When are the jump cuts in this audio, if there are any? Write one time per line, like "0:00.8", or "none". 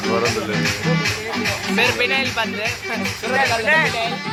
none